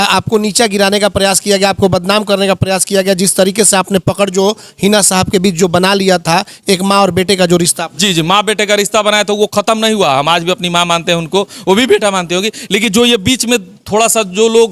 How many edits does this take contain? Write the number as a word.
zero